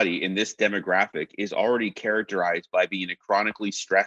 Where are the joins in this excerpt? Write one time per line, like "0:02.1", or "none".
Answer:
none